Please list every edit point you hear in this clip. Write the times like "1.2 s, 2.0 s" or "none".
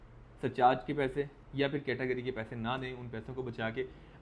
none